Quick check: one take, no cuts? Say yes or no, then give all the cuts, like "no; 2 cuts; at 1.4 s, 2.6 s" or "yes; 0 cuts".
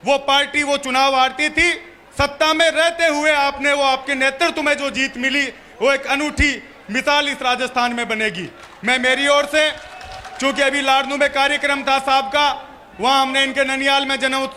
yes; 0 cuts